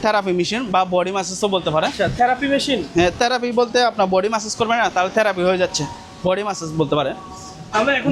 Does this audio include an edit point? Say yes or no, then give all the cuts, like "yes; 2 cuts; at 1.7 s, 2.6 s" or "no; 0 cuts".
no; 0 cuts